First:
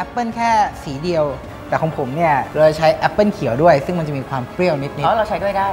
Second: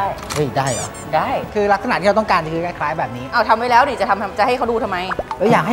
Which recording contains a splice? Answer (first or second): second